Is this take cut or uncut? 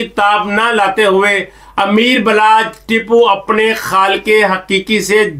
uncut